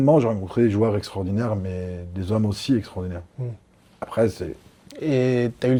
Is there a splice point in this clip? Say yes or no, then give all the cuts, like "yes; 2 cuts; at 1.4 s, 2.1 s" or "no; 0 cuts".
no; 0 cuts